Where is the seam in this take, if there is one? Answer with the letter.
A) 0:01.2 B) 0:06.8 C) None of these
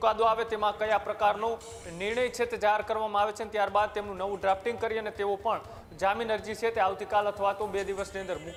C